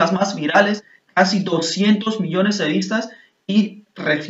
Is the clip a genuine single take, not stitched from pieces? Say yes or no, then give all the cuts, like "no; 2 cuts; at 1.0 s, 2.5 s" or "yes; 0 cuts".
no; 1 cut; at 0.9 s